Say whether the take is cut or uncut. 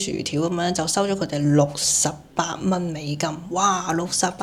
uncut